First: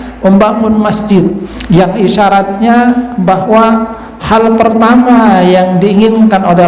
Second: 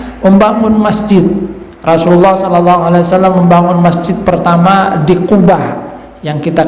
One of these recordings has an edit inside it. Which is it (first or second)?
first